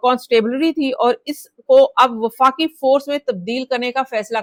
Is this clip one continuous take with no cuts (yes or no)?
yes